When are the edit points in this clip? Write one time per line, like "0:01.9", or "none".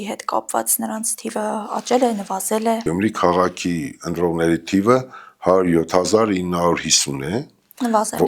0:02.8